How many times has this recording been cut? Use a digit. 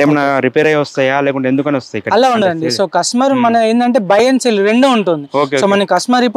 0